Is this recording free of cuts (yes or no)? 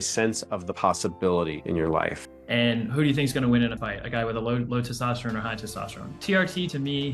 no